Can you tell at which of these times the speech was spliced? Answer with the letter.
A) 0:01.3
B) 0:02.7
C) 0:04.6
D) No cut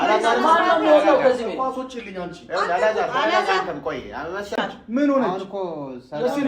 C